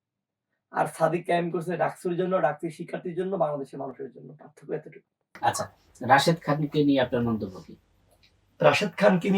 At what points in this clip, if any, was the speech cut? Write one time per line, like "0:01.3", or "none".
none